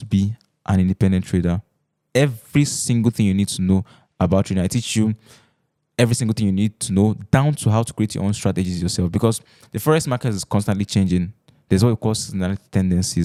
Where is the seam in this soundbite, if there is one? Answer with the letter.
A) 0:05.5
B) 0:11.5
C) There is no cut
C